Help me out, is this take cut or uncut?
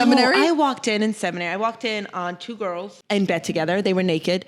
cut